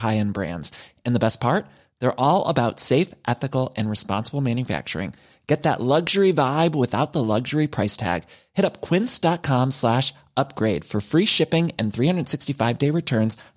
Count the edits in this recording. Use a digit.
0